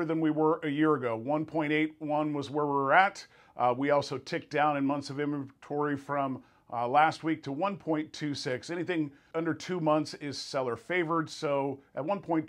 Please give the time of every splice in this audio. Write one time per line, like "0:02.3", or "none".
0:09.3